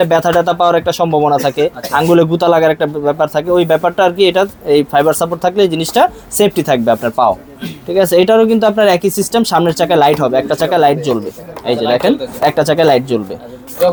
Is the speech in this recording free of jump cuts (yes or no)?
yes